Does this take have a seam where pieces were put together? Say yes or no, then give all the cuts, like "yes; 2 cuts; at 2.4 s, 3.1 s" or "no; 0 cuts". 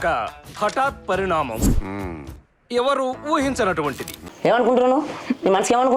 yes; 1 cut; at 4.2 s